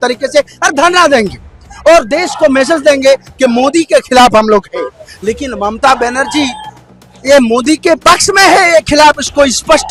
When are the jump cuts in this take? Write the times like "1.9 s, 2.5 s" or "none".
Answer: none